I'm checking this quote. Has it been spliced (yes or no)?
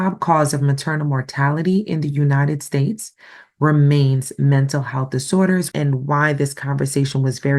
yes